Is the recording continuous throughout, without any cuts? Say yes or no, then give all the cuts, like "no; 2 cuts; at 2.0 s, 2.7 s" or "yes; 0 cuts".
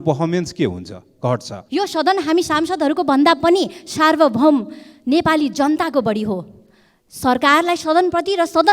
no; 1 cut; at 1.6 s